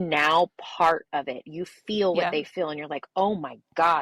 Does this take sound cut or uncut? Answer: uncut